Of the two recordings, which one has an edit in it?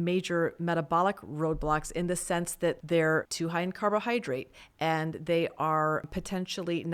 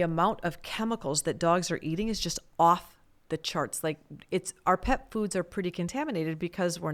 first; 3 cuts; at 2.8 s, 3.3 s, 6.1 s

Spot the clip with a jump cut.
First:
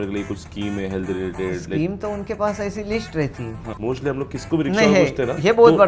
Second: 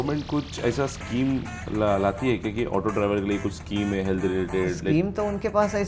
first; 1 cut; at 3.6 s

